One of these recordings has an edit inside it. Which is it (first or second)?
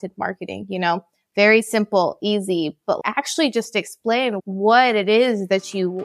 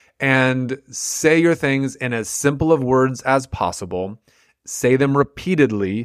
first